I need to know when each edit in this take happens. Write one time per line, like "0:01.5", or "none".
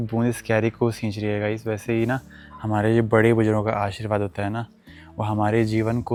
none